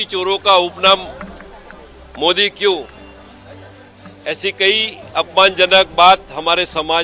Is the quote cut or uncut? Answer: uncut